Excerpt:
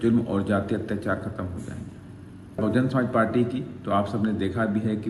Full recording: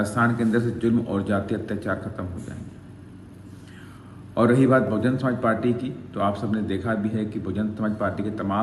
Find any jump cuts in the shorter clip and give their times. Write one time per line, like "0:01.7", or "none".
0:02.6